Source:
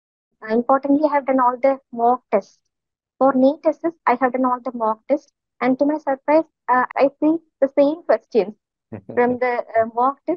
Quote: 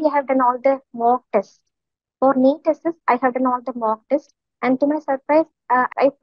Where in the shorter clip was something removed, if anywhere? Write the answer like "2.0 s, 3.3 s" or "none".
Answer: none